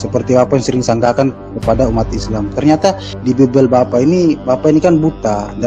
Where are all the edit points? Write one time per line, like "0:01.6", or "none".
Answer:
0:03.1